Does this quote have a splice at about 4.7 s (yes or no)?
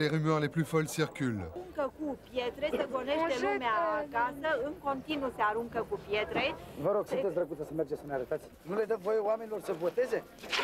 no